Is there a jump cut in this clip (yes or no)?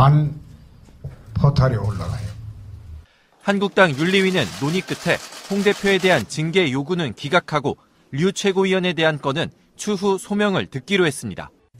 no